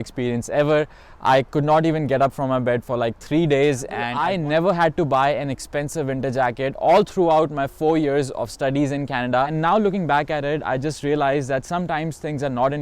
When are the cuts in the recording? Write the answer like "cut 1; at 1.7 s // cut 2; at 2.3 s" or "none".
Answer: cut 1; at 4.1 s // cut 2; at 9.5 s